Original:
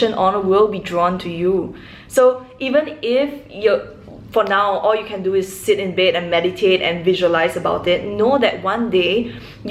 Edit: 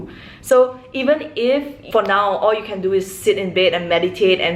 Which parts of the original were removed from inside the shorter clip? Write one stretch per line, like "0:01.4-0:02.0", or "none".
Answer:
0:03.4-0:04.2